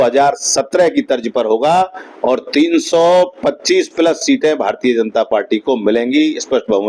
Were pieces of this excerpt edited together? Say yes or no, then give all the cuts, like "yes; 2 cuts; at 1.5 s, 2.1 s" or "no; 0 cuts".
no; 0 cuts